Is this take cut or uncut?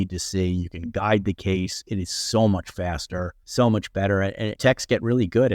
cut